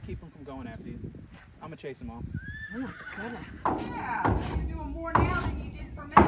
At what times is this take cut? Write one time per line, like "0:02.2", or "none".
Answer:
0:03.5